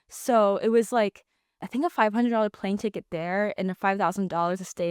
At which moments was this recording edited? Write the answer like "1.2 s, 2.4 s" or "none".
1.6 s